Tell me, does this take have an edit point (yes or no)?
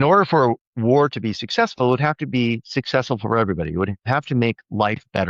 no